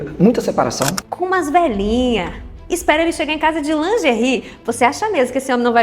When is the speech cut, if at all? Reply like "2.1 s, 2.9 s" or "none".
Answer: 1.0 s